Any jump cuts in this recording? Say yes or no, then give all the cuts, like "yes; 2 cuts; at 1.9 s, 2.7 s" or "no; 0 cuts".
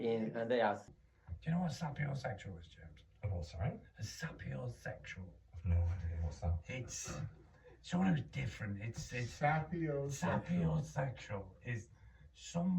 yes; 1 cut; at 1.0 s